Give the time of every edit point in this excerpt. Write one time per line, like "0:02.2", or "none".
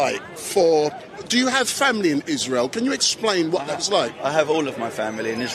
none